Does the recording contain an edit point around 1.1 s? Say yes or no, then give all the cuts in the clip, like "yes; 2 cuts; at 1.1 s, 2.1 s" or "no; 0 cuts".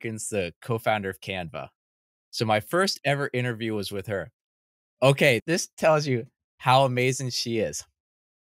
no; 1 cut; at 5.4 s